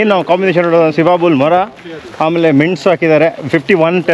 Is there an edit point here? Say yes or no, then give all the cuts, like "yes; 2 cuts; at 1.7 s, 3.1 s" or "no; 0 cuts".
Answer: no; 0 cuts